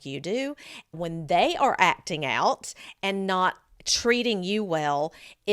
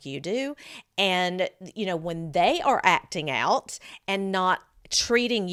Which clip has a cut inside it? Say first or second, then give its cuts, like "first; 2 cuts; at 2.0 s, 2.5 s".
first; 1 cut; at 1.0 s